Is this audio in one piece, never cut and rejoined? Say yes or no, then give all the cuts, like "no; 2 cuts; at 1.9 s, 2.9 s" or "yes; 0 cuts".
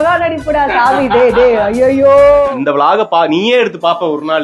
no; 1 cut; at 2.5 s